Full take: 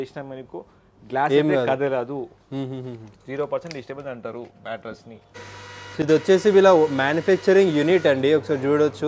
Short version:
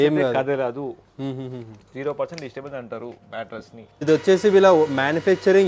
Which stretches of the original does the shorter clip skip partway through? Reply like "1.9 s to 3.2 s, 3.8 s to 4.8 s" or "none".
5.3 s to 6.0 s